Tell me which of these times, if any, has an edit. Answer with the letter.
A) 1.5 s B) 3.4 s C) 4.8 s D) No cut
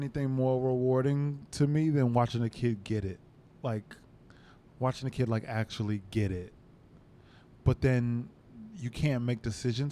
B